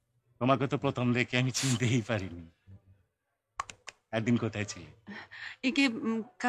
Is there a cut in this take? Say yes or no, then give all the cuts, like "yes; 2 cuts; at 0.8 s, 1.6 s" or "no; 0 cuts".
no; 0 cuts